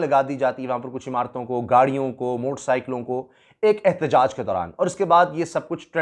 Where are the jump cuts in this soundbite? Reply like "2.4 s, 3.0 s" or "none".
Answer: none